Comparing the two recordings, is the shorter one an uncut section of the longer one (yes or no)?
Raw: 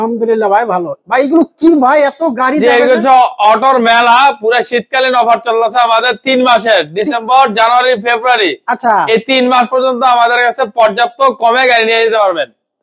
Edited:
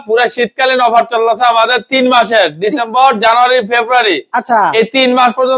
yes